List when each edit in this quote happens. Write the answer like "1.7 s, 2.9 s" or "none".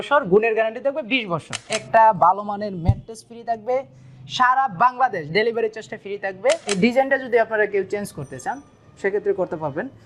1.7 s, 6.8 s